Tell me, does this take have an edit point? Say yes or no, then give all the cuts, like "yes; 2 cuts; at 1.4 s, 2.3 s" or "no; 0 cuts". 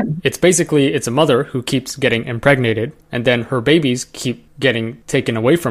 no; 0 cuts